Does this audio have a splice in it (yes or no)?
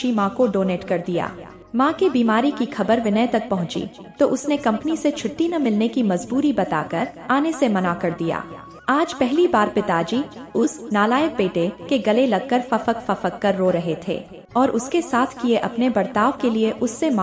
no